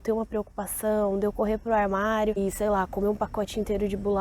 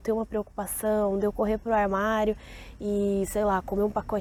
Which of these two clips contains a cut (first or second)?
first